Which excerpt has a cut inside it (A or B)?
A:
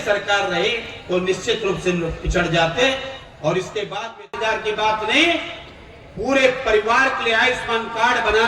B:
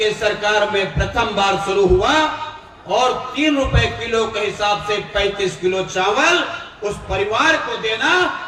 A